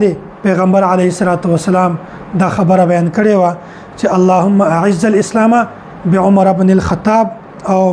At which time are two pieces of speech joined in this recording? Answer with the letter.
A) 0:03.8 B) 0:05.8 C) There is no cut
C